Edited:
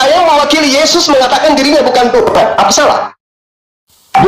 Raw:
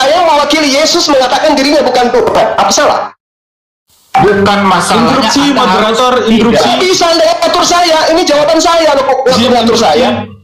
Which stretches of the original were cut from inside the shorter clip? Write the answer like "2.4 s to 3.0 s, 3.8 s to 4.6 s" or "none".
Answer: none